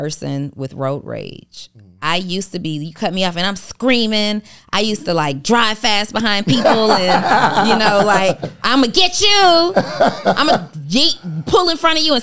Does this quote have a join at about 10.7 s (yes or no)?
no